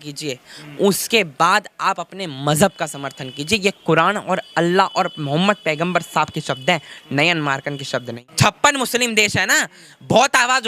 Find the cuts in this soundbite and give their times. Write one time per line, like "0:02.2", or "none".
0:08.2

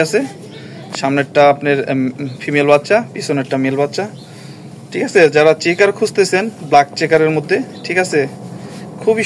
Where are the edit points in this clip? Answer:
none

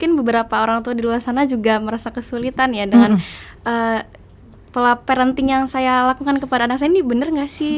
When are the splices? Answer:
none

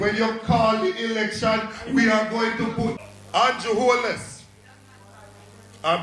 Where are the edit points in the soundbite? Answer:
0:02.9

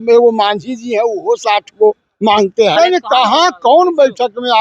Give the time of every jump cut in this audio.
0:02.8

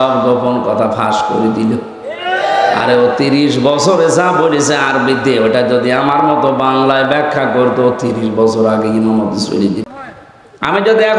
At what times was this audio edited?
0:09.9

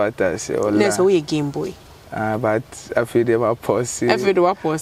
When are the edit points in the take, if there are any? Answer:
none

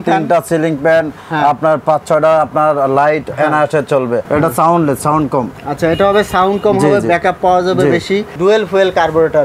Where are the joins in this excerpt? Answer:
0:04.2
0:08.3

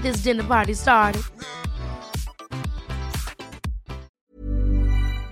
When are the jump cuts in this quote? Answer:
0:04.2

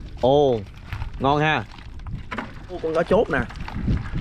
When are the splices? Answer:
0:02.8

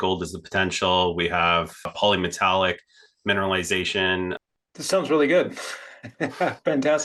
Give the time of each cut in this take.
0:04.3

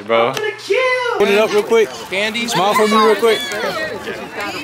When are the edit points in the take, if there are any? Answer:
0:01.2

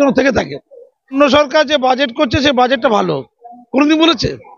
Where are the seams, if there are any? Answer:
0:01.1

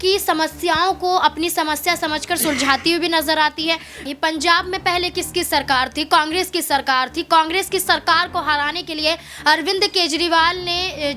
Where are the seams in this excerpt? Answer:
0:04.1

